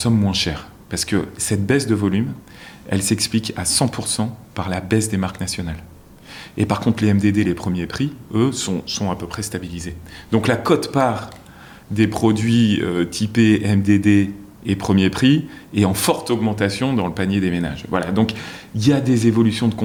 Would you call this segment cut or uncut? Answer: uncut